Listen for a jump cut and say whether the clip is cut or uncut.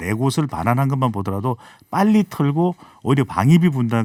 uncut